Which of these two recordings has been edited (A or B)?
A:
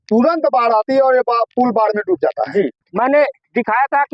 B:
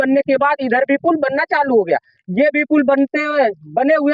A